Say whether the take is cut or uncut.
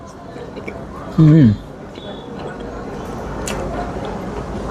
uncut